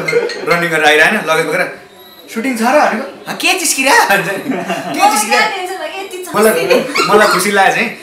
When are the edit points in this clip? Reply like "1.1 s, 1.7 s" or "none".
6.3 s